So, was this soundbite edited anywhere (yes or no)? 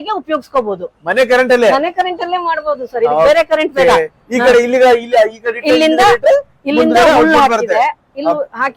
no